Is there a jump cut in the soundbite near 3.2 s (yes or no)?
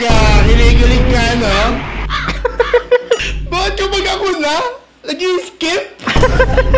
yes